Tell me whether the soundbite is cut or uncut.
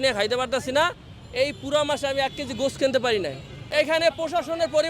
cut